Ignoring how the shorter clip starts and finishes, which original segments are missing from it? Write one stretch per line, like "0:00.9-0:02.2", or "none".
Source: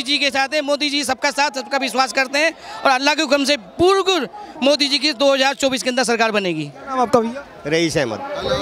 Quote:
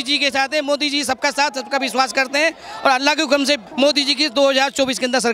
0:03.7-0:04.5